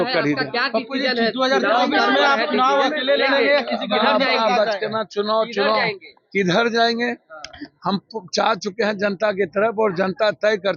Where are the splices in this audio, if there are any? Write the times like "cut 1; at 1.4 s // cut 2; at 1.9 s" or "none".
none